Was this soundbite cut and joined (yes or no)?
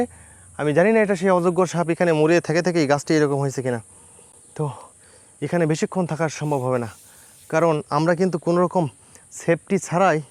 no